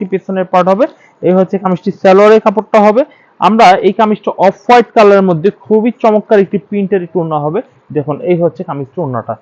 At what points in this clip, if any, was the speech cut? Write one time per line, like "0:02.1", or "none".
none